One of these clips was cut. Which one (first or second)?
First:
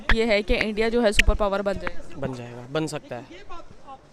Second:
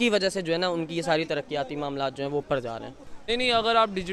second